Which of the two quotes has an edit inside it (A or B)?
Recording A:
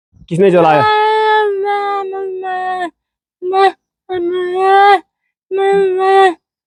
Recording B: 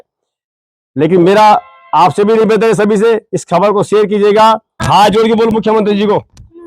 B